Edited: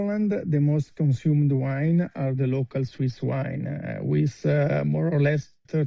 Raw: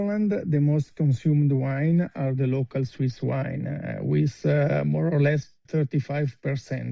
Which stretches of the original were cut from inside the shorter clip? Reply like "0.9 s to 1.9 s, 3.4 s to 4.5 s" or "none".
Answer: none